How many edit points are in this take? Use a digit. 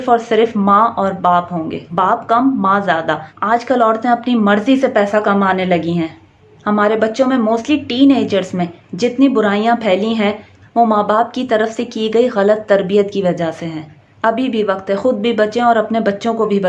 3